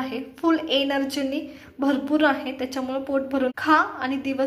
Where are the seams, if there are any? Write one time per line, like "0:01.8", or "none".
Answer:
0:03.5